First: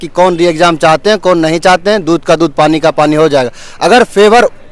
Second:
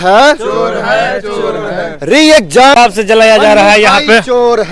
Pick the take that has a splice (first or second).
second